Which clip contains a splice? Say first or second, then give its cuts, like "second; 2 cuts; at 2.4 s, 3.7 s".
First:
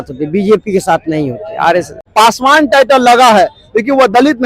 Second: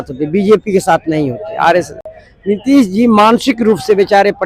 first; 1 cut; at 2.0 s